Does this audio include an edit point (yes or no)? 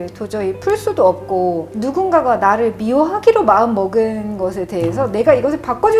yes